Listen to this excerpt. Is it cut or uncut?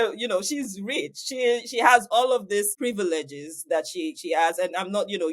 cut